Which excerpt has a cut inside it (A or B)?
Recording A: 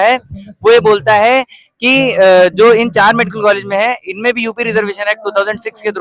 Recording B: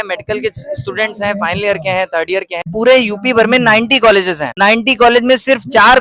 B